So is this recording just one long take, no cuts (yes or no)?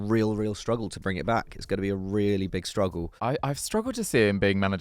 no